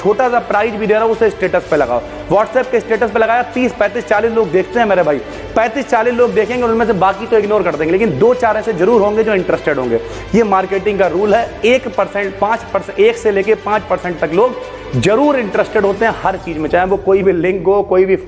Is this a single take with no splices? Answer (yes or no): yes